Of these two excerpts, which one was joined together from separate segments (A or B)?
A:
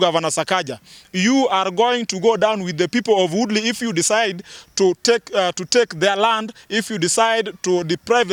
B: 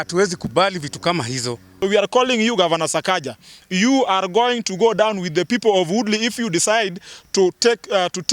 B